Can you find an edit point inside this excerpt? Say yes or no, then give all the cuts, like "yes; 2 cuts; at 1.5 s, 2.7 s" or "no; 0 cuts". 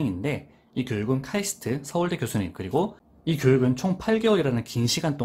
yes; 1 cut; at 3.1 s